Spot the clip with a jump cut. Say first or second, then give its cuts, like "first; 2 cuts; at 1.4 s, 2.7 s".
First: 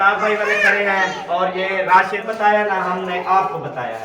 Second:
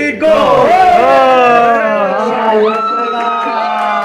first; 1 cut; at 2.2 s